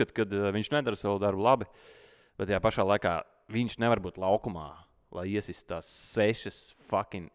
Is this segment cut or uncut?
uncut